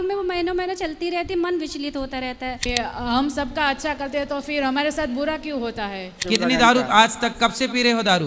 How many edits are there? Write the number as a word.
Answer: two